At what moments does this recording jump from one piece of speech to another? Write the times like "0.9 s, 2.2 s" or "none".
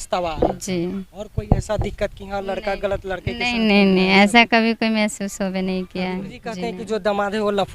6.5 s